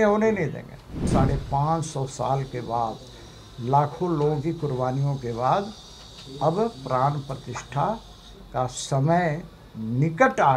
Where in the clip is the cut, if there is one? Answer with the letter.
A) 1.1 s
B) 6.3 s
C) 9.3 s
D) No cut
A